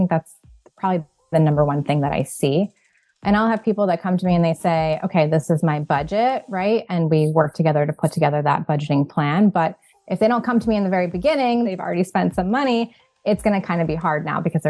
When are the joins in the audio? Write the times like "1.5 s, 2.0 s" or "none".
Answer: 11.7 s